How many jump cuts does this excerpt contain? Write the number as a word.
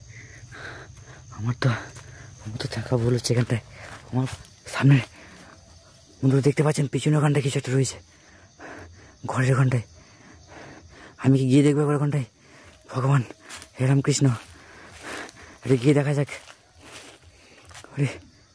one